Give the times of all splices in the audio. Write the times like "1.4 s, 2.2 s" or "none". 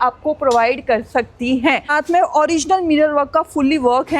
1.9 s

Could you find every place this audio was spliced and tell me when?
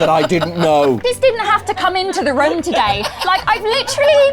1.0 s

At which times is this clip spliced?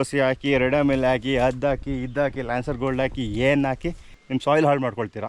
4.0 s

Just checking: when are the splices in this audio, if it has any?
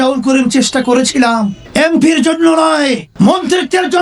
1.6 s, 3.1 s

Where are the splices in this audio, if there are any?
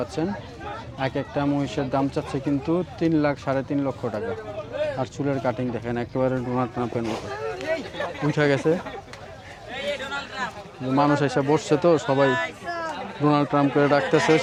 none

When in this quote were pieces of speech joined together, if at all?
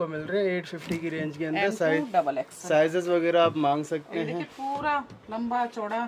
none

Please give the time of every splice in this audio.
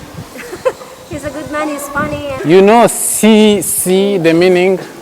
2.4 s

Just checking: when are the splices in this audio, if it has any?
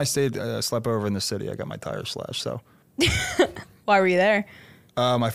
2.8 s

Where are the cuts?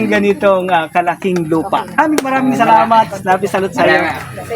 2.0 s

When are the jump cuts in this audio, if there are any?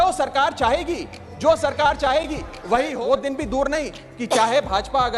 2.9 s

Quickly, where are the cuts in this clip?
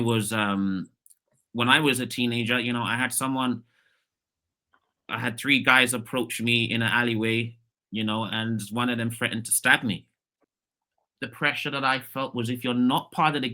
10.3 s

